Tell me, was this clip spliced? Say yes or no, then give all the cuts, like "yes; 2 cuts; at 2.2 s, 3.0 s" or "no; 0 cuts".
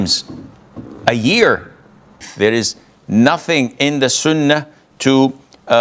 yes; 1 cut; at 2.2 s